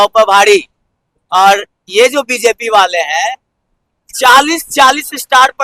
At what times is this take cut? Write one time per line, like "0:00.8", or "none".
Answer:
none